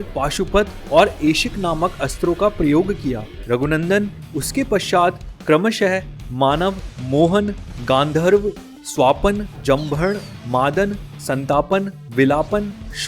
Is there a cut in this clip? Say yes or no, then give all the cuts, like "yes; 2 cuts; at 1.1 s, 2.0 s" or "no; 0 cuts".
no; 0 cuts